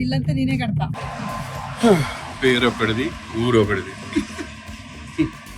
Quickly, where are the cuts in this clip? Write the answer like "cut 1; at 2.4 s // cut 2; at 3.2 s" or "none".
cut 1; at 0.9 s